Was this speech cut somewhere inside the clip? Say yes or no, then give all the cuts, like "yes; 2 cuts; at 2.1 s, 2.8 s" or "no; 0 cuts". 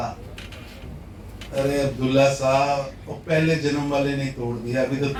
no; 0 cuts